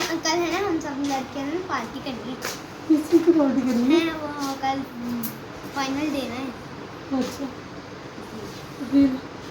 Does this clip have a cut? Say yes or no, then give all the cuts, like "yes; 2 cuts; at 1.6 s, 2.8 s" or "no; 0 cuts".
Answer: yes; 1 cut; at 4.9 s